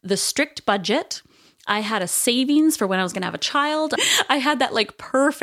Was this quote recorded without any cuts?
no; 1 cut; at 4.0 s

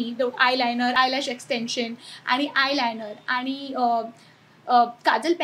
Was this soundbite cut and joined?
no; 0 cuts

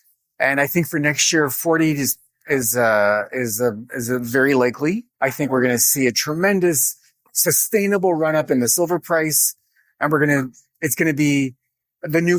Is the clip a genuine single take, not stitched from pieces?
no; 1 cut; at 5.1 s

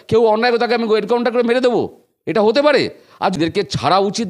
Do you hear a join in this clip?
yes; 1 cut; at 3.4 s

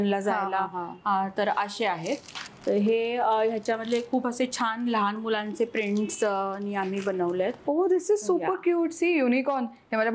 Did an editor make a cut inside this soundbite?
no; 0 cuts

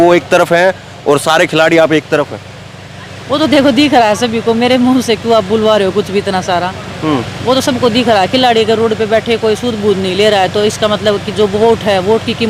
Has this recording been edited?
no; 0 cuts

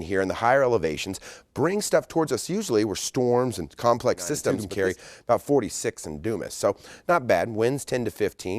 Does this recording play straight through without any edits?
no; 1 cut; at 4.6 s

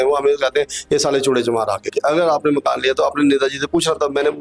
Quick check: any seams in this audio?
yes; 1 cut; at 1.9 s

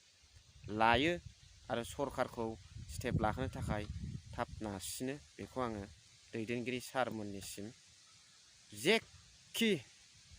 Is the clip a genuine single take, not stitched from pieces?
no; 1 cut; at 6.0 s

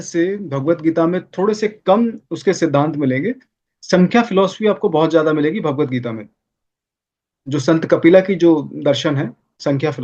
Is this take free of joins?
yes; 0 cuts

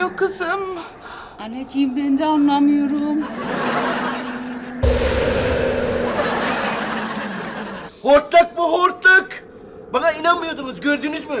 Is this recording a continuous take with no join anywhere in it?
no; 1 cut; at 7.9 s

